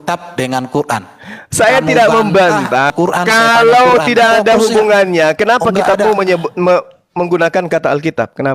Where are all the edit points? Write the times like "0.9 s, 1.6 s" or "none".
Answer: 2.9 s